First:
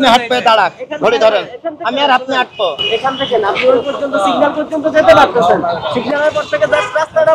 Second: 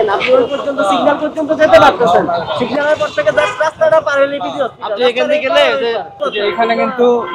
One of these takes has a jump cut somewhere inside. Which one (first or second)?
second